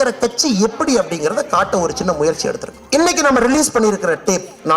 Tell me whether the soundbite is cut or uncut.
cut